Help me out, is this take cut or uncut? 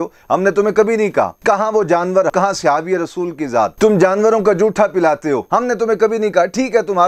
cut